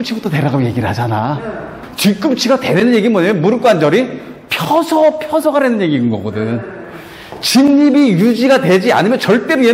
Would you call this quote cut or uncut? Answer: cut